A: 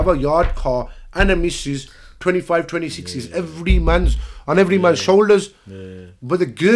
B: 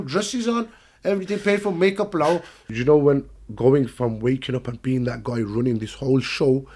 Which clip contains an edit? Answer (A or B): B